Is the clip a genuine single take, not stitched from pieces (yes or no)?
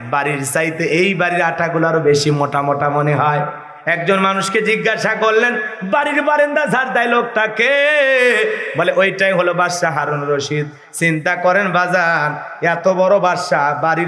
yes